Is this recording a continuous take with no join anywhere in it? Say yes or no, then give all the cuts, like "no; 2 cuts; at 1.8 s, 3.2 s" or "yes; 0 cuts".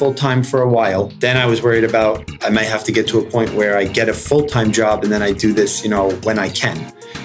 no; 1 cut; at 1.1 s